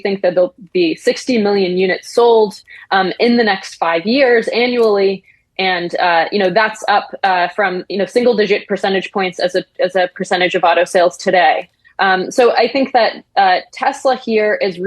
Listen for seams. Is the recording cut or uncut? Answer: uncut